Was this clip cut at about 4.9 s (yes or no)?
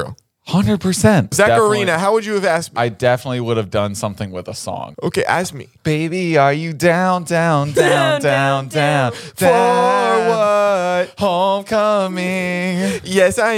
yes